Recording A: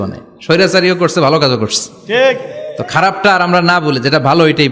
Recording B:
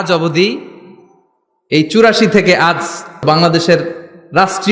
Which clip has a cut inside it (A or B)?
B